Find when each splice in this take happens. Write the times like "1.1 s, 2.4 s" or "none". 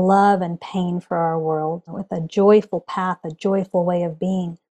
1.9 s